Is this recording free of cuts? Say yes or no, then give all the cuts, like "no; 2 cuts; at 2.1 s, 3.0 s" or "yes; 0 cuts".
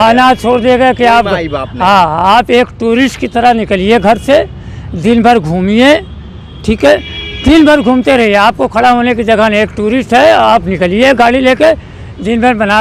yes; 0 cuts